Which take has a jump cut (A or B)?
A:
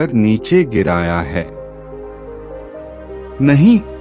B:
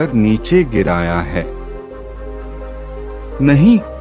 B